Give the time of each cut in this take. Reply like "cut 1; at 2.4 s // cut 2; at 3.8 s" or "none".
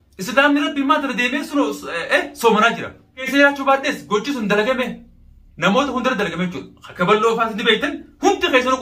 cut 1; at 3.3 s